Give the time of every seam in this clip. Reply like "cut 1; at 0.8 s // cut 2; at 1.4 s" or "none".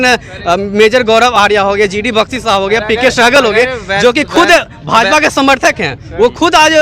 none